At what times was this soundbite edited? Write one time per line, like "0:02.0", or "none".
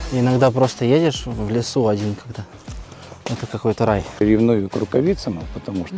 0:04.2